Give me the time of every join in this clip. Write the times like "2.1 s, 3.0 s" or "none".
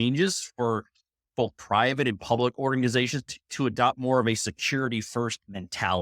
none

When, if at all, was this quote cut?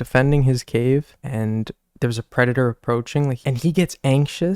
1.2 s, 3.4 s

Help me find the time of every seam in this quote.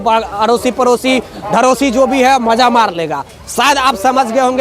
none

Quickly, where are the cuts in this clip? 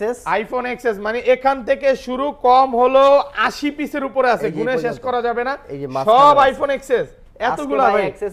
none

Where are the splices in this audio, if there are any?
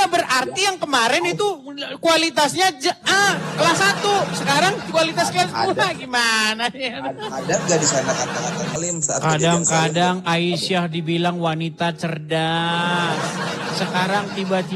8.7 s

